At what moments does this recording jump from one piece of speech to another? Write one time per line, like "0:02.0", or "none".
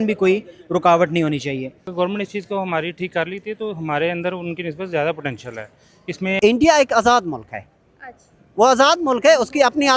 0:01.8
0:06.4